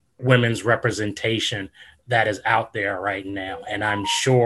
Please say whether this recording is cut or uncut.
uncut